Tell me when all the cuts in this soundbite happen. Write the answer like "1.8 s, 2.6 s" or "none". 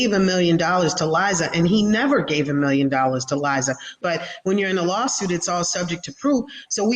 4.0 s